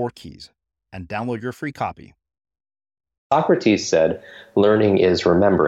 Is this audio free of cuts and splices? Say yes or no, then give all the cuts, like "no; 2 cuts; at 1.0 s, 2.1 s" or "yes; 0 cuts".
no; 1 cut; at 3.3 s